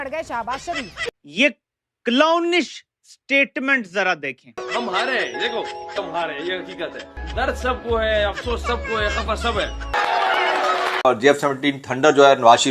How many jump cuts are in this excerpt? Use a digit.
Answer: 3